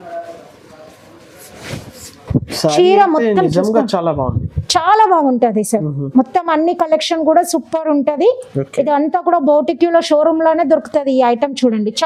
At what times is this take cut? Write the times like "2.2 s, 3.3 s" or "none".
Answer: none